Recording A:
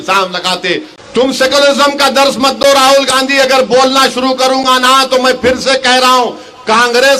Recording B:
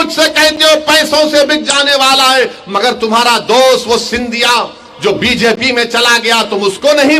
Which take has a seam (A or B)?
A